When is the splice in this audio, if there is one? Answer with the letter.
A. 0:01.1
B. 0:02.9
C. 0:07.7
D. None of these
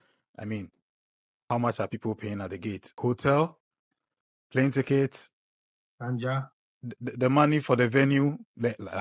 B